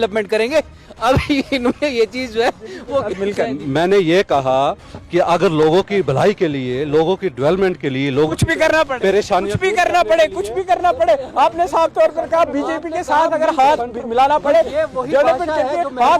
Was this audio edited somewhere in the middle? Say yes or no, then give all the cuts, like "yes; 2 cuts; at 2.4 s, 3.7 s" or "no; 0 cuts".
no; 0 cuts